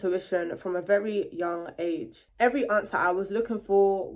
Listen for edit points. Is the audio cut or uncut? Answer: cut